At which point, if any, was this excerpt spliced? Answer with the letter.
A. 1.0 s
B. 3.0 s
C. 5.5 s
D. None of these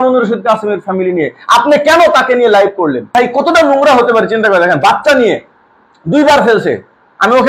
B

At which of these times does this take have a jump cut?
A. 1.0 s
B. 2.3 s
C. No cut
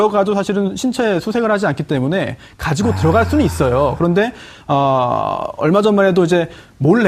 A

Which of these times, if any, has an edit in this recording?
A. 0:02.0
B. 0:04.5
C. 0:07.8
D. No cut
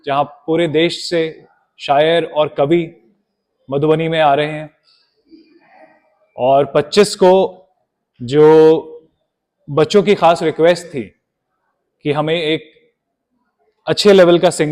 D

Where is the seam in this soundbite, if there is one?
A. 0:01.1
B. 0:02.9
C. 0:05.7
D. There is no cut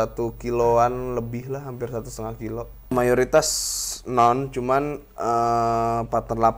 B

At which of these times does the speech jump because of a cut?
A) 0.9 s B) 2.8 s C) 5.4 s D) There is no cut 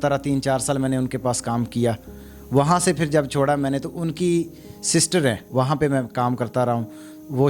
C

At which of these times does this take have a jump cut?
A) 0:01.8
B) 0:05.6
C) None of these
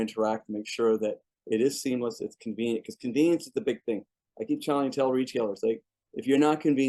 C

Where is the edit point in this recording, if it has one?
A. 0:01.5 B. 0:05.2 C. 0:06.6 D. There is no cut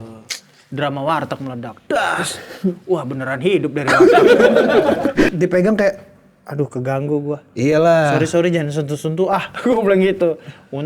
B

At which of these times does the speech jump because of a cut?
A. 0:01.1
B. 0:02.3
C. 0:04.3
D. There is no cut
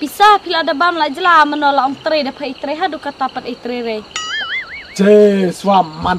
C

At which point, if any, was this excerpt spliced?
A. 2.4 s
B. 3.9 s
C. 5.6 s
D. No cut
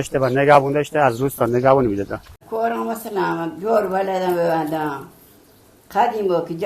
A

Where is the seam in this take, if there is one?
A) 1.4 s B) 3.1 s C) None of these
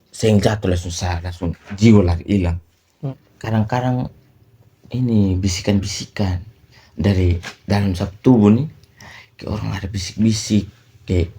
B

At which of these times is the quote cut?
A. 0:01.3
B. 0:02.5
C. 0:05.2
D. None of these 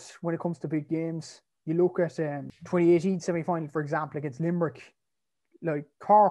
B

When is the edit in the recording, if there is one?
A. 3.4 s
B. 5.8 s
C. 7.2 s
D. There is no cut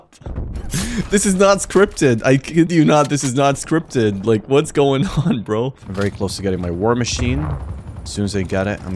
B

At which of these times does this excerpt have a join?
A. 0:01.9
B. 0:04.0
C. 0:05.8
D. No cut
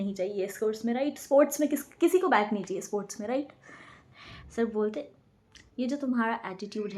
B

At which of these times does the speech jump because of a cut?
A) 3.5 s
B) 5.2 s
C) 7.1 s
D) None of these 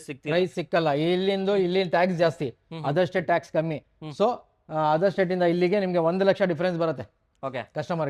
D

